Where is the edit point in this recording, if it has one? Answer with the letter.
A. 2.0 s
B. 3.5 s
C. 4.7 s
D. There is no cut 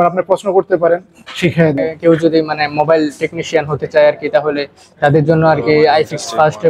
A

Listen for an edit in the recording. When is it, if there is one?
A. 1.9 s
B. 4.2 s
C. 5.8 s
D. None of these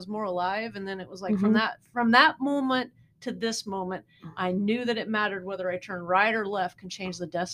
D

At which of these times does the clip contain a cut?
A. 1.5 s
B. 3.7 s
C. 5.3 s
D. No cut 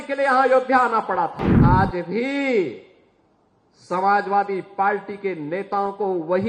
A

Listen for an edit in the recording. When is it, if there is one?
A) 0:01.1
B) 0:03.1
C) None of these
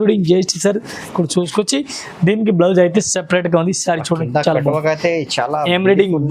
A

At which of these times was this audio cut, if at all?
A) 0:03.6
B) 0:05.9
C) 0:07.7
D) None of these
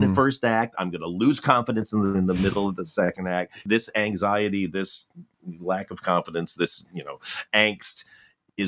A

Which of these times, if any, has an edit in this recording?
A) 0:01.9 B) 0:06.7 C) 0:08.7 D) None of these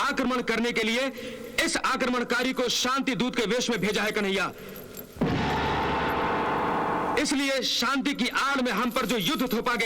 D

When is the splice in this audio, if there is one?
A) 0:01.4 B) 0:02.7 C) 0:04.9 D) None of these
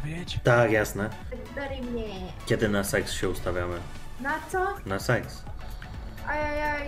A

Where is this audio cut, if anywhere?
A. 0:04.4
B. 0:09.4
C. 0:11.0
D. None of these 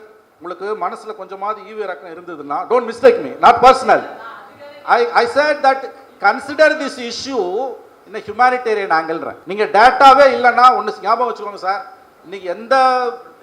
B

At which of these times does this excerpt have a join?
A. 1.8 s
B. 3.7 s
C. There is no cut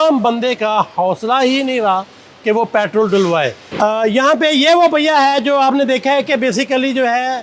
B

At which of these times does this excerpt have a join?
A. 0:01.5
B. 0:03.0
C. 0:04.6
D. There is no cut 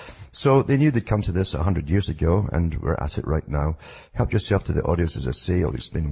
C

